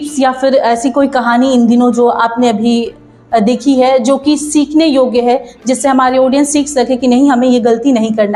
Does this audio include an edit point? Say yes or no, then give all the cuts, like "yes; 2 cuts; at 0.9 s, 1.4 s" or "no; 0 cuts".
no; 0 cuts